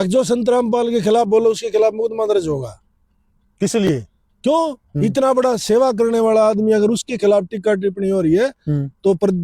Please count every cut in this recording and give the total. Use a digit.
0